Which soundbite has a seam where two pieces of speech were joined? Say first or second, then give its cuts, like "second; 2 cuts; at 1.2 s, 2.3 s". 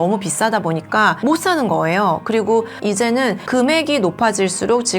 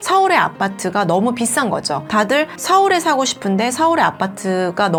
first; 1 cut; at 2.8 s